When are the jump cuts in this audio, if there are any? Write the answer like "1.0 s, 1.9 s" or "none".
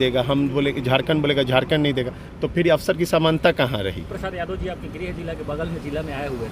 4.0 s